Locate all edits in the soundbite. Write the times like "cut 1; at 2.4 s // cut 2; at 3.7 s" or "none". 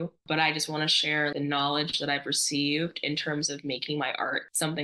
cut 1; at 1.3 s